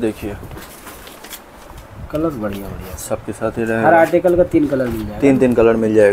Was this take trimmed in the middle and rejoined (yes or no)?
no